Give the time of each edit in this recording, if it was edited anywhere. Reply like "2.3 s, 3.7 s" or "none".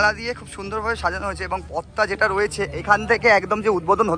none

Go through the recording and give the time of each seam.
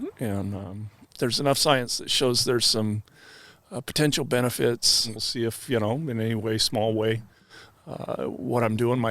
1.0 s, 5.1 s

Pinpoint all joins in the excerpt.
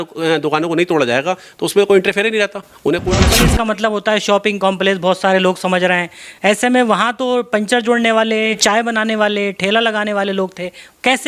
3.3 s

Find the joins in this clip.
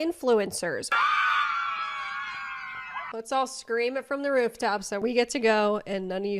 0.9 s, 3.0 s

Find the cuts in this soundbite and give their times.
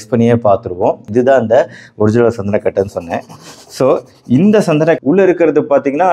5.0 s

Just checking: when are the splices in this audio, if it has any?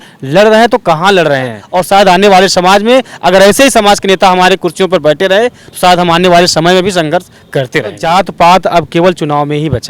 1.7 s, 8.0 s

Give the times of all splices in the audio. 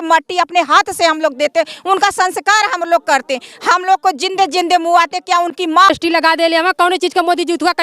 5.9 s

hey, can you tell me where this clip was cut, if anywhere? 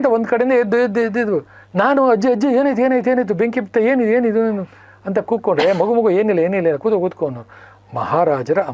none

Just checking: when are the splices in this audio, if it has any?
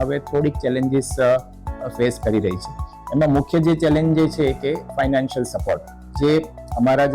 6.1 s

